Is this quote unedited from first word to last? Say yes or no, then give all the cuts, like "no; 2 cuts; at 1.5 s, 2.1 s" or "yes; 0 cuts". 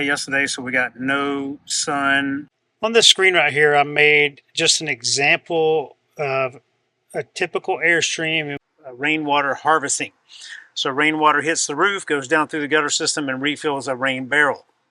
no; 2 cuts; at 2.5 s, 8.5 s